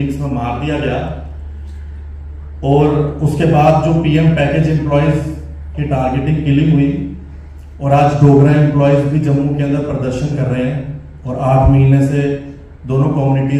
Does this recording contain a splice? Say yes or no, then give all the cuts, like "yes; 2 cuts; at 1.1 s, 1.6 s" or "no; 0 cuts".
no; 0 cuts